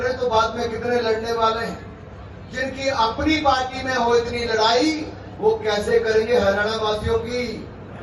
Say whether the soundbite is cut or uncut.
uncut